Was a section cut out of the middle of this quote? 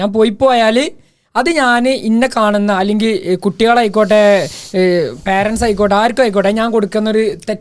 no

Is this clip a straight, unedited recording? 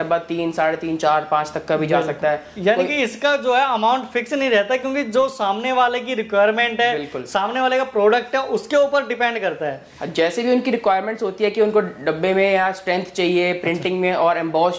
yes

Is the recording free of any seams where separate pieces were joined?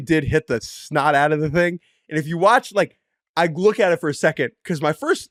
yes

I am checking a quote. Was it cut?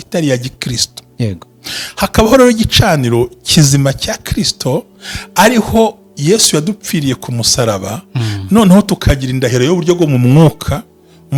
no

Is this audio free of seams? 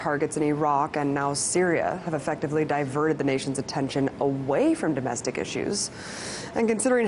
no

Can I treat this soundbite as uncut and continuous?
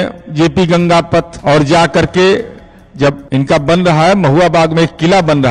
no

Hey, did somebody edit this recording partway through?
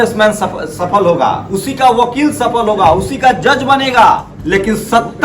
yes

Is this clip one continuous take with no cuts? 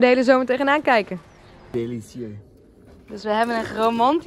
no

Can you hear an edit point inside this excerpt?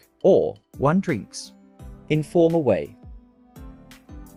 no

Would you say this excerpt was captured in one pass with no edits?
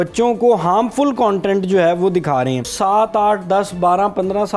no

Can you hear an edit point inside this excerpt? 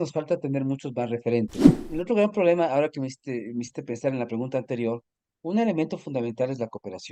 yes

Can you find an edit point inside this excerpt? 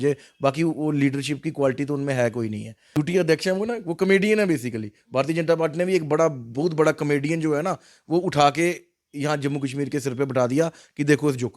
yes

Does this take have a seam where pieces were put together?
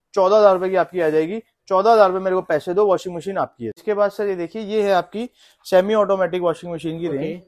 yes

